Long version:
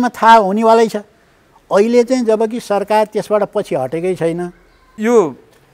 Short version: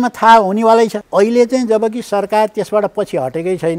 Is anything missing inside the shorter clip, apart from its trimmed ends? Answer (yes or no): yes